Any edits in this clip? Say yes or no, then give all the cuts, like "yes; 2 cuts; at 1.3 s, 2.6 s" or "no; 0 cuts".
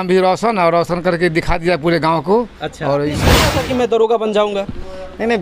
yes; 1 cut; at 3.4 s